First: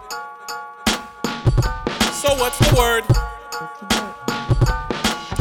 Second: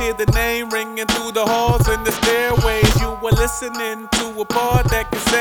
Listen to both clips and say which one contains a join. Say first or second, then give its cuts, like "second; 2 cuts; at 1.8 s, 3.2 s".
first; 1 cut; at 3.0 s